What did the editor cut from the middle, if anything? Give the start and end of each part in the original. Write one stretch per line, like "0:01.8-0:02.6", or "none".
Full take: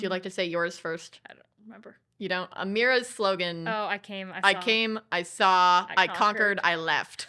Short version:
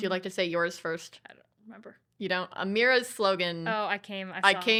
none